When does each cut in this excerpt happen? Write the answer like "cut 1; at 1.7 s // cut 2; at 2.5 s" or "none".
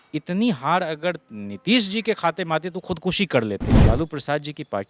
cut 1; at 3.8 s